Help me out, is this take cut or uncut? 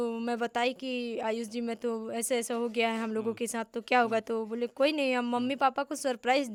uncut